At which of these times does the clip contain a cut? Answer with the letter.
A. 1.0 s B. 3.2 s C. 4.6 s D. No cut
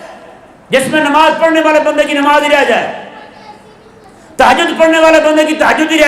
D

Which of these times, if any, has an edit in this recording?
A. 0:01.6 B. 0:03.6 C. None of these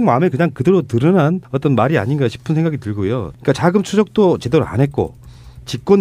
B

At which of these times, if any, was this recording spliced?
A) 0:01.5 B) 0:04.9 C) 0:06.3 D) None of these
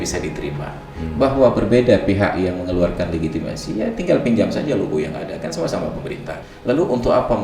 C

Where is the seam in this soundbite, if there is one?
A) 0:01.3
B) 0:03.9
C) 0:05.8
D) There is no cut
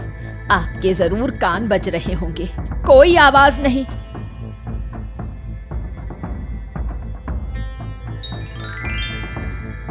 B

